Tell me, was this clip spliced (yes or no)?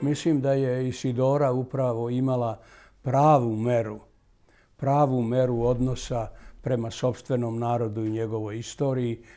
no